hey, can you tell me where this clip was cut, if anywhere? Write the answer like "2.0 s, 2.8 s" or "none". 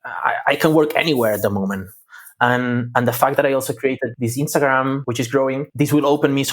4.1 s, 5.5 s